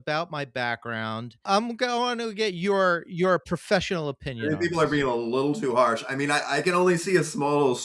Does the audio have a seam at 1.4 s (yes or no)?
yes